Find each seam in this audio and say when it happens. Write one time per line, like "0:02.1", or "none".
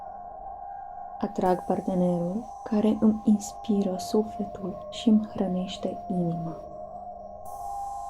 0:01.2
0:06.9